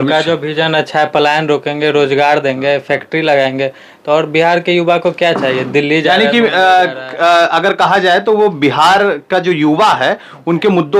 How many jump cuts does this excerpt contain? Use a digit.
0